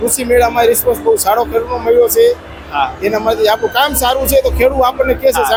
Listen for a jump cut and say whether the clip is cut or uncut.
uncut